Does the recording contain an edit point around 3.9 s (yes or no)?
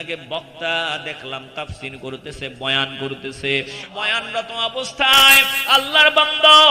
yes